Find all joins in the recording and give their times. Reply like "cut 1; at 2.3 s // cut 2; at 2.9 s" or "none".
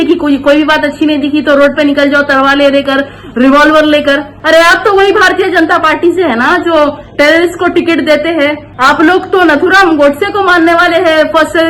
cut 1; at 4.3 s // cut 2; at 8.7 s